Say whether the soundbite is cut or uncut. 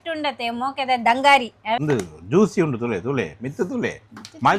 cut